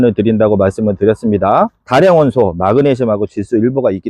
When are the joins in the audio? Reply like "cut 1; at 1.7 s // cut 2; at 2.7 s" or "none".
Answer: cut 1; at 1.8 s